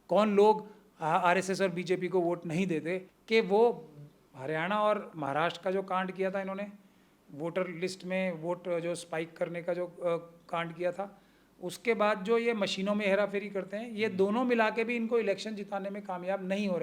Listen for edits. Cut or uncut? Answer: cut